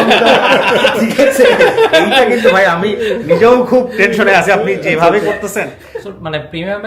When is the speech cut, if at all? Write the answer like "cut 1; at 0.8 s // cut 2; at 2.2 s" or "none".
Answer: cut 1; at 5.8 s